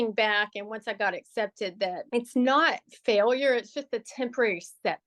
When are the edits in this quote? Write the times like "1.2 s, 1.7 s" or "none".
2.0 s